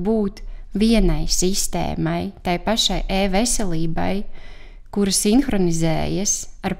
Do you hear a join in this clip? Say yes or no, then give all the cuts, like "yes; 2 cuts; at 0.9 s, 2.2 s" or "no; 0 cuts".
no; 0 cuts